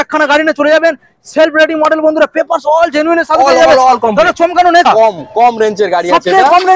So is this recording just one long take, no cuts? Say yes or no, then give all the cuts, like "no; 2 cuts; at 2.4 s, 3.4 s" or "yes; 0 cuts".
no; 1 cut; at 4.9 s